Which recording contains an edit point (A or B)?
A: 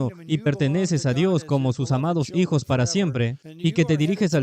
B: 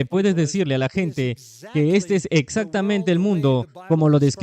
A